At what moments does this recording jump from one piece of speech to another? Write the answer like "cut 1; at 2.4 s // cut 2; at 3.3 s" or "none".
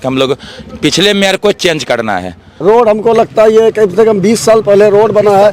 cut 1; at 2.5 s